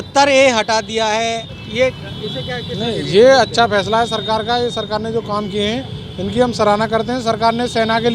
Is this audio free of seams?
no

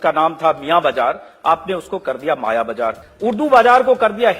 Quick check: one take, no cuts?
no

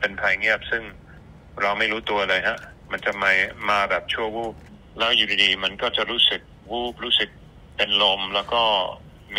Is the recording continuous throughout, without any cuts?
no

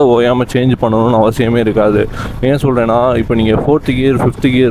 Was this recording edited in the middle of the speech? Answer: no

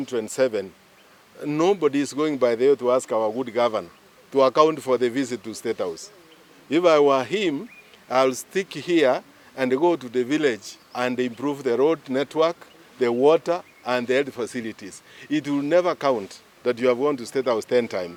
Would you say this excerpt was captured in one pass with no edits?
yes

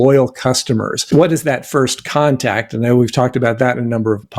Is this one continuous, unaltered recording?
no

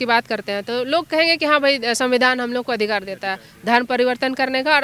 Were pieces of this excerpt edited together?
no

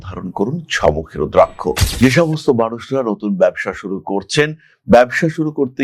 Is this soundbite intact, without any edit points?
no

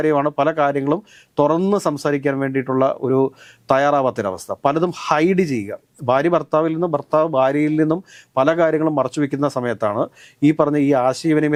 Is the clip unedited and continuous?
yes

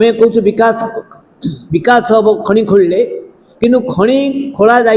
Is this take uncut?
yes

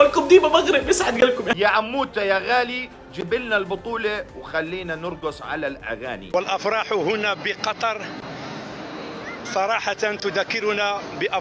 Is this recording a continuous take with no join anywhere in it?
no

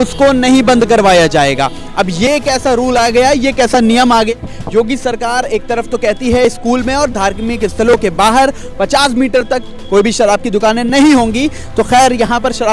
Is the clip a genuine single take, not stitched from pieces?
no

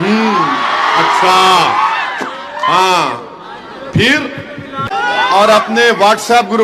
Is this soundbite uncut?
no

